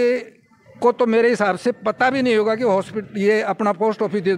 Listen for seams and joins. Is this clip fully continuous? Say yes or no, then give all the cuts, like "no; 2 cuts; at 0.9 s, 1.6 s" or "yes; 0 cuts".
yes; 0 cuts